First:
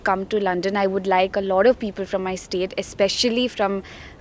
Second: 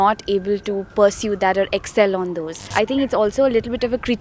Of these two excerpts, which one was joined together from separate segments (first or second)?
second